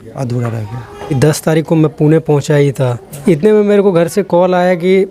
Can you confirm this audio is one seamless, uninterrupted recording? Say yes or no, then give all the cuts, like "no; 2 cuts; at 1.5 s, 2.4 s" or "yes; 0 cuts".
no; 2 cuts; at 1.1 s, 3.1 s